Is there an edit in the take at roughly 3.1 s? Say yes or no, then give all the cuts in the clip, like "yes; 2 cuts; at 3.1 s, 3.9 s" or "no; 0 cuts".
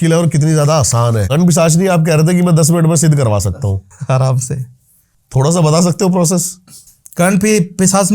no; 1 cut; at 1.2 s